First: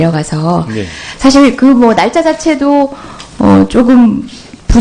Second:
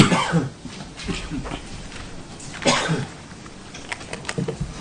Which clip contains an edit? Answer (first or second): first